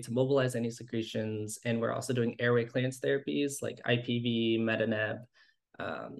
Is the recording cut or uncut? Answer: uncut